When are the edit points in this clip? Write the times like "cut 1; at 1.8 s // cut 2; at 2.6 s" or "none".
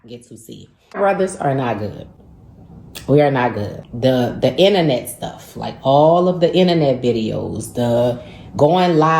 cut 1; at 1.0 s